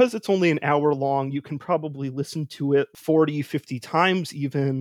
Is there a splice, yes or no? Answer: yes